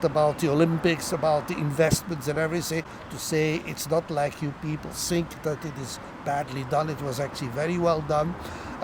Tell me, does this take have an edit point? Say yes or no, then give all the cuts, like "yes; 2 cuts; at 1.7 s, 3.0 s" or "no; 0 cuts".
no; 0 cuts